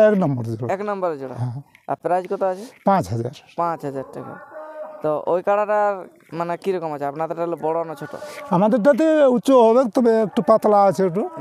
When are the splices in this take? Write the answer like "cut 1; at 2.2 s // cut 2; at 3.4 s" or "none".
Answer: none

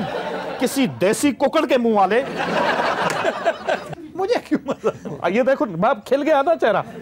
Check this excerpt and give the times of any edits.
cut 1; at 3.8 s

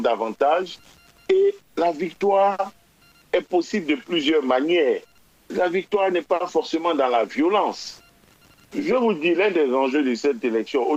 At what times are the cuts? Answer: none

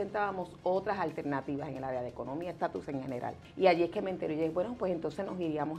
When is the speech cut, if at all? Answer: cut 1; at 3.4 s

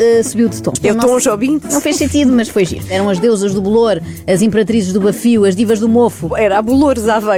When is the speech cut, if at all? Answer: none

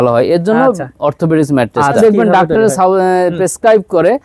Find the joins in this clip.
cut 1; at 2.0 s

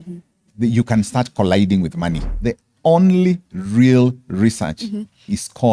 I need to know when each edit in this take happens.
cut 1; at 2.3 s

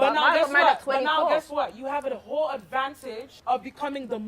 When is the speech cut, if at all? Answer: cut 1; at 3.3 s

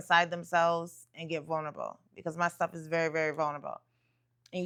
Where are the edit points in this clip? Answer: none

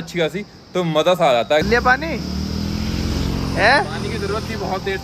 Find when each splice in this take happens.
cut 1; at 1.6 s

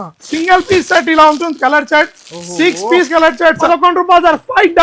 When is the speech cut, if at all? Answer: cut 1; at 3.7 s

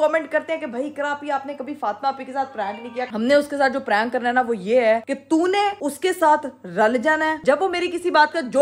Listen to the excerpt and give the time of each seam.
cut 1; at 3.1 s // cut 2; at 7.4 s

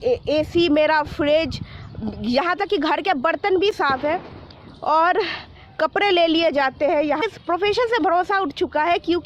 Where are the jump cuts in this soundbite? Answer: cut 1; at 7.2 s

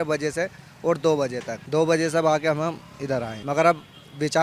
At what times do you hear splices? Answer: cut 1; at 1.5 s // cut 2; at 3.4 s

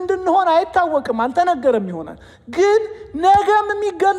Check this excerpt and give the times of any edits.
none

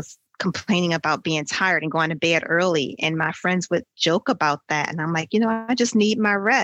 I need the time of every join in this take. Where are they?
none

